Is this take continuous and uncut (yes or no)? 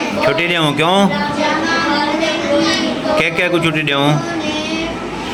yes